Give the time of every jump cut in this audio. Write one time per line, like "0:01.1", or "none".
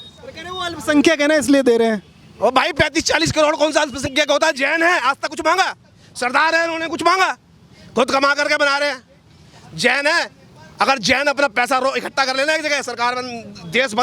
none